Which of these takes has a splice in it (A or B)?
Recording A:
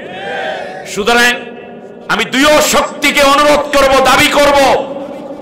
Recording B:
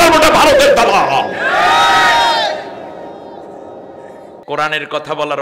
B